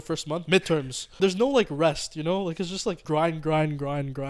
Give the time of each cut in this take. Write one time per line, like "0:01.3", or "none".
0:01.2
0:03.0